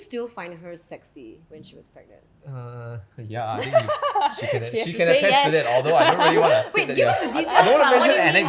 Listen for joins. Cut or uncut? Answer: cut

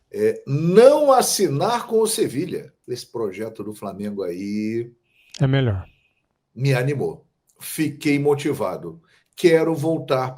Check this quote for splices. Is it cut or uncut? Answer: cut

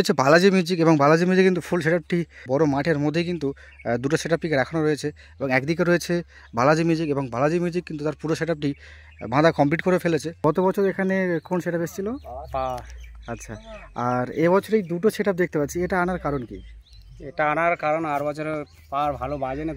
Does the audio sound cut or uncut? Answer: cut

